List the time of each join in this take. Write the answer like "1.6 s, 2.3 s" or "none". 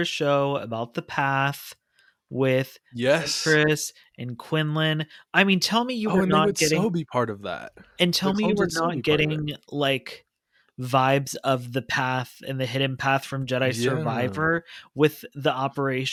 none

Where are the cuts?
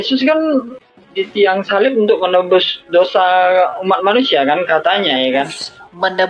none

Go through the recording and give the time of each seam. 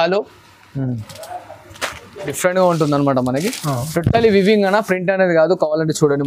2.4 s

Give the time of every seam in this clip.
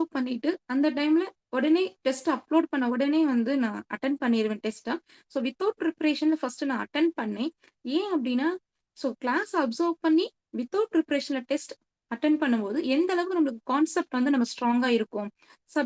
none

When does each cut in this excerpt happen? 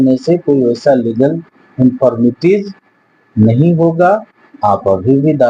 none

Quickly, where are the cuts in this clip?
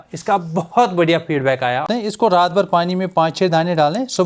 1.9 s

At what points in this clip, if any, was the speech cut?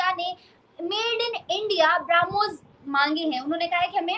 none

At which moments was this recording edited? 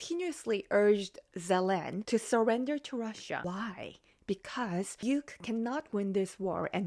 1.9 s, 3.4 s, 4.9 s

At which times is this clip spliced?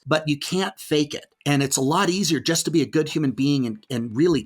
1.3 s

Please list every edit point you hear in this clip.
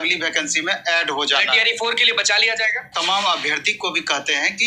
2.9 s

